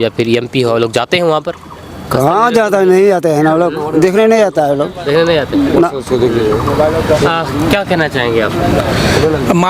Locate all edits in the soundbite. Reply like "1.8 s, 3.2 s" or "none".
none